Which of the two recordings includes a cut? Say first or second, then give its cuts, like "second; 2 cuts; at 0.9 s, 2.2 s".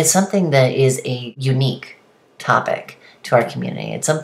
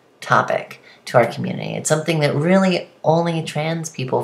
first; 1 cut; at 1.3 s